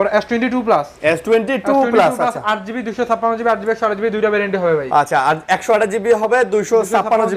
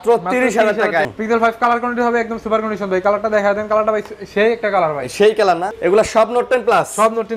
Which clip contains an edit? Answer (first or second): second